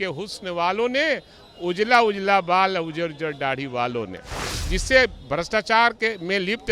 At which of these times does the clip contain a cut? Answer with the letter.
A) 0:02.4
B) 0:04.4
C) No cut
B